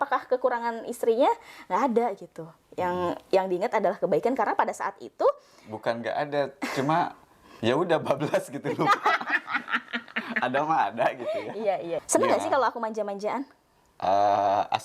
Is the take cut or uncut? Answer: cut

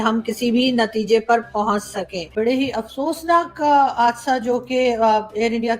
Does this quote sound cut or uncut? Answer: cut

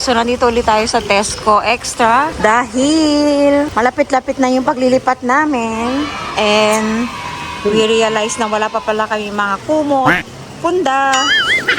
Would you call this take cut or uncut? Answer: uncut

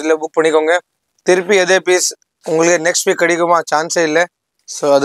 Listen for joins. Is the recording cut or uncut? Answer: uncut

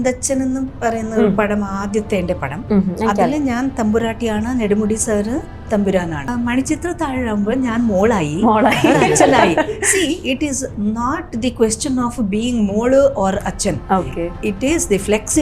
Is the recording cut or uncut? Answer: cut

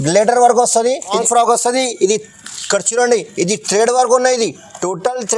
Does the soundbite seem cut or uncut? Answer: cut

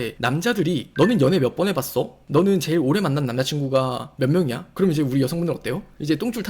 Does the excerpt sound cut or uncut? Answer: cut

